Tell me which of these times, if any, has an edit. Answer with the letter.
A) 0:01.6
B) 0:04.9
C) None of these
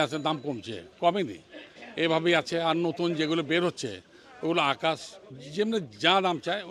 C